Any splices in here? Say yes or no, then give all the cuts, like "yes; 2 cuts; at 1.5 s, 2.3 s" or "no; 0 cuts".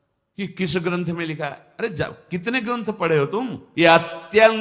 yes; 1 cut; at 3.6 s